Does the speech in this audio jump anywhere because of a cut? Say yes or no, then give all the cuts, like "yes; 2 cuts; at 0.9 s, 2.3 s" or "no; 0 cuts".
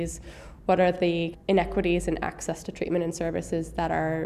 yes; 1 cut; at 1.3 s